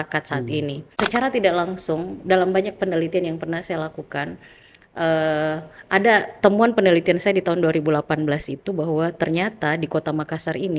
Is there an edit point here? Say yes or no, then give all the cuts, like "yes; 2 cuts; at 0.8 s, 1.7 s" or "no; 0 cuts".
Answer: yes; 1 cut; at 1.0 s